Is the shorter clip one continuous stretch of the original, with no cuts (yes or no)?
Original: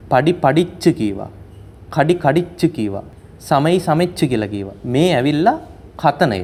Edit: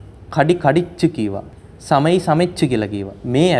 yes